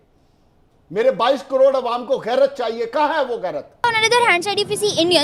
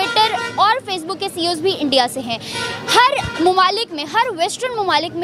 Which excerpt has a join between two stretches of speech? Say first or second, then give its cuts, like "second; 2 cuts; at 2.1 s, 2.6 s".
first; 1 cut; at 4.0 s